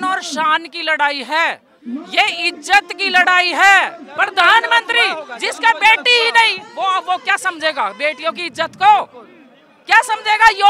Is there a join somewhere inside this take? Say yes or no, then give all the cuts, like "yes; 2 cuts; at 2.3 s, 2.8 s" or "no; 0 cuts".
yes; 1 cut; at 4.0 s